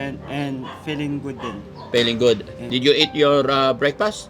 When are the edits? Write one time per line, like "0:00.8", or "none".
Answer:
0:02.6